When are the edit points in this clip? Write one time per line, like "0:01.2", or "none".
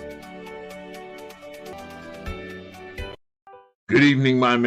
0:01.7